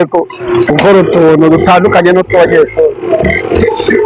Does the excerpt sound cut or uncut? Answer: uncut